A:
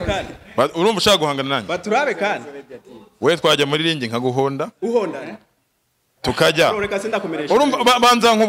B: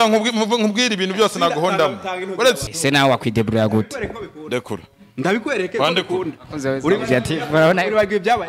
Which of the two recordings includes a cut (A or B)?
B